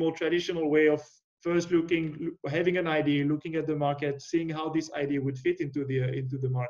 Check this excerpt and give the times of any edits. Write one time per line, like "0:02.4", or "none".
none